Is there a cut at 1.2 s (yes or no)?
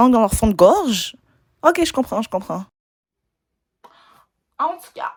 no